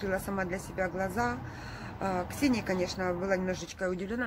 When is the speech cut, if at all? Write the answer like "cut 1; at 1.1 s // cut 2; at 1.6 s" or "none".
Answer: none